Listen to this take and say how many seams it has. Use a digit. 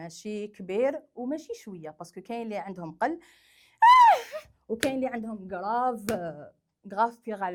0